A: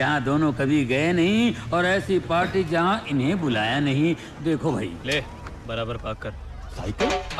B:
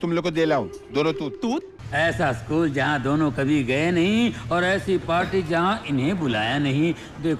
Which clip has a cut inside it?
B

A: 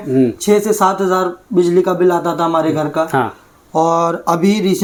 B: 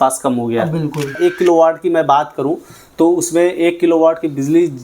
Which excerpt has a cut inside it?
B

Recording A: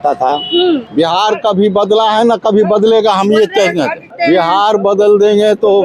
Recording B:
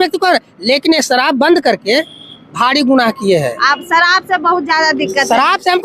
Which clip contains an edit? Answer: A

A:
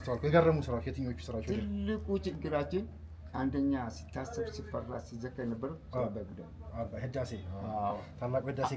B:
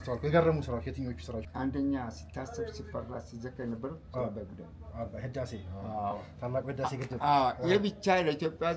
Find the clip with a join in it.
B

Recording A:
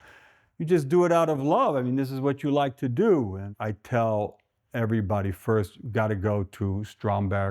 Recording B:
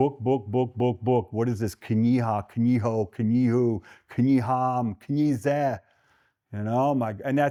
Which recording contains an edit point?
A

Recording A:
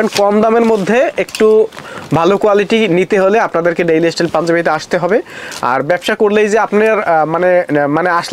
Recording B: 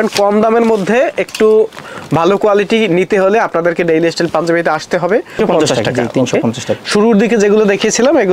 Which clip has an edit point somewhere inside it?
B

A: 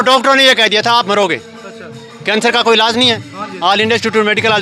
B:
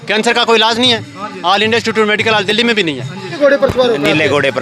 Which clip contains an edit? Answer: B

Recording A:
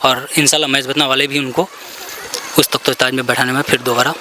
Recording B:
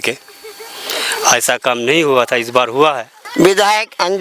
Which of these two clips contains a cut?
B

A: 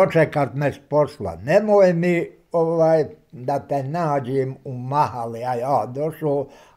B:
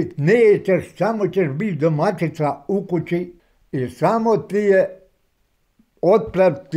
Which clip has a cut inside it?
B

